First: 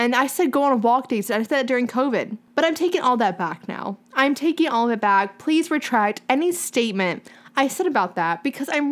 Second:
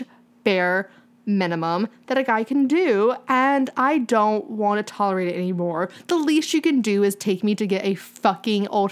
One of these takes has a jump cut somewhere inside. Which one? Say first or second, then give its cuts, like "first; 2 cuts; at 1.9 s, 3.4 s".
first; 1 cut; at 2.4 s